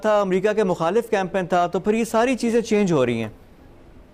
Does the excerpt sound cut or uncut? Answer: uncut